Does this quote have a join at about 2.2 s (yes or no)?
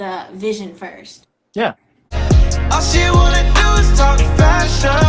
yes